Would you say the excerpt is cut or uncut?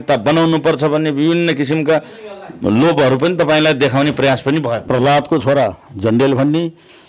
cut